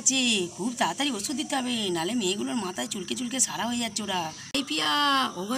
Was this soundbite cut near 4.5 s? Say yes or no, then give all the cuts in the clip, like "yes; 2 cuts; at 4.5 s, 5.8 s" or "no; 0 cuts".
yes; 1 cut; at 4.5 s